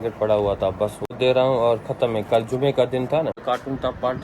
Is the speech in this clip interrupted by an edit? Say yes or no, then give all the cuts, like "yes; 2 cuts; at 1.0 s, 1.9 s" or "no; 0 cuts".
yes; 2 cuts; at 1.0 s, 3.4 s